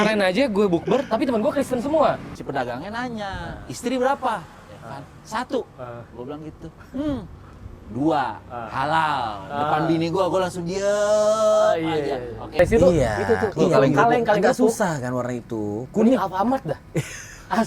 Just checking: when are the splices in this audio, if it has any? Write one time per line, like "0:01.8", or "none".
0:02.3
0:12.6